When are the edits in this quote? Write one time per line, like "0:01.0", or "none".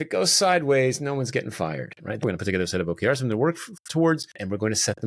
none